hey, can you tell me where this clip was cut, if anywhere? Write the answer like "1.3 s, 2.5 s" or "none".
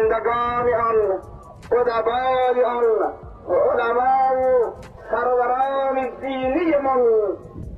none